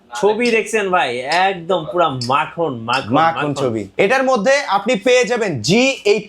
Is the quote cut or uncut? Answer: cut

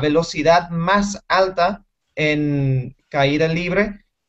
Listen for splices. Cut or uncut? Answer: cut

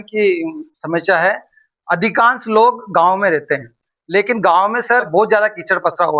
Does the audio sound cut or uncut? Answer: cut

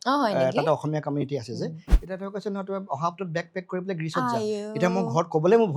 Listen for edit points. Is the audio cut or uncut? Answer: cut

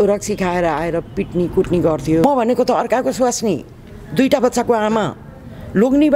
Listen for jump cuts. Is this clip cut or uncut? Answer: cut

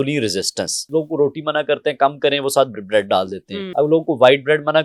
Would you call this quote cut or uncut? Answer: cut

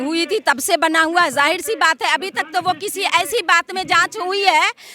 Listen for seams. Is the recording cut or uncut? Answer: uncut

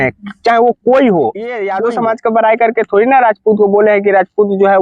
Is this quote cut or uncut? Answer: cut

